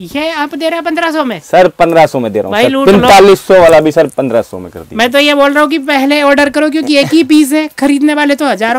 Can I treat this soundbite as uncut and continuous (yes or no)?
yes